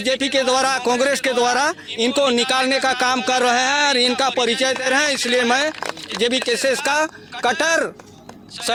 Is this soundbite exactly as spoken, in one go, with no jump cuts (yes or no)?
yes